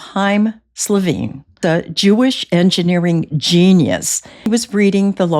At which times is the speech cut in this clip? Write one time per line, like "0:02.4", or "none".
0:01.6
0:04.5

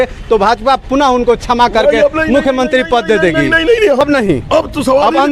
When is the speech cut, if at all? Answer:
0:04.0

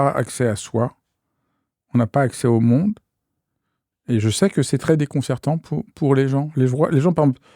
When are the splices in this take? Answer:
none

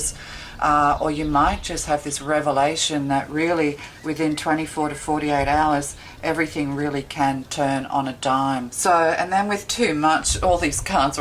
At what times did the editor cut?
none

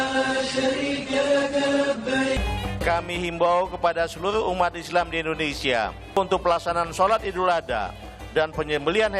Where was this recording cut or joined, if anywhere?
0:02.3

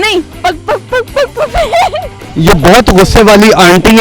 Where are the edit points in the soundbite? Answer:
0:02.2

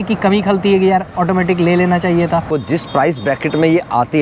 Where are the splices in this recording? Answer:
0:02.5

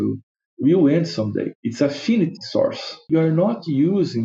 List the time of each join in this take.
0:01.6
0:03.1

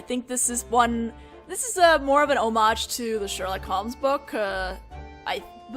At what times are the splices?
0:04.9

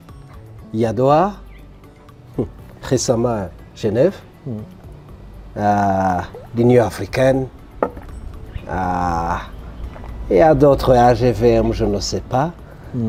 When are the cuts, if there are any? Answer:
none

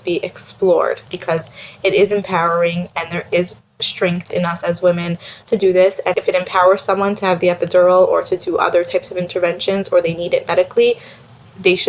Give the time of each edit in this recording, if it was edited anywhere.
0:01.0
0:06.1

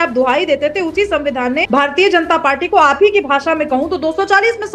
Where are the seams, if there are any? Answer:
0:01.6

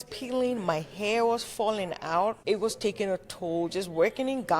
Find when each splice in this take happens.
0:02.4

